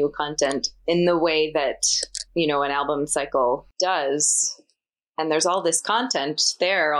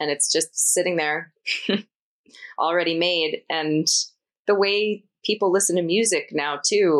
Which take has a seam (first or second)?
first